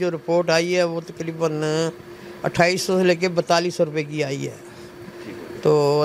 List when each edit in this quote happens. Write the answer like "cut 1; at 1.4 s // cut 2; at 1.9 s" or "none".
none